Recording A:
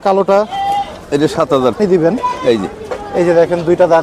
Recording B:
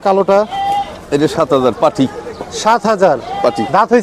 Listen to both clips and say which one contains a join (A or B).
A